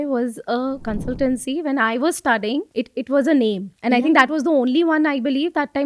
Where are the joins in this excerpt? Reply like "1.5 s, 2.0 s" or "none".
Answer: 0.8 s, 2.7 s, 3.7 s